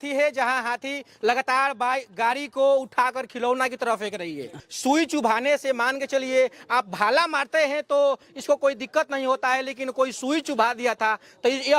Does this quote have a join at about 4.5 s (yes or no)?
yes